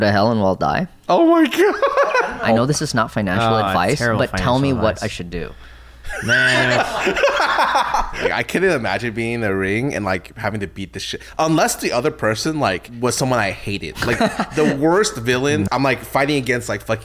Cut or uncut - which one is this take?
cut